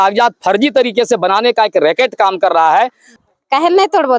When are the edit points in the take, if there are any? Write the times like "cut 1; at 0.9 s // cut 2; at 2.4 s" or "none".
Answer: cut 1; at 3.1 s